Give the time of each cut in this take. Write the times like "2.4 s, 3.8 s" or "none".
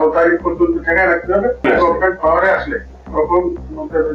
none